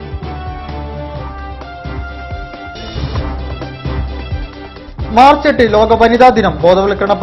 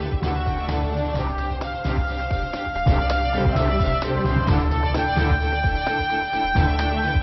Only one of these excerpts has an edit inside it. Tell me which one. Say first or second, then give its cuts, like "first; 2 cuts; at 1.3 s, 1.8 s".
second; 1 cut; at 2.5 s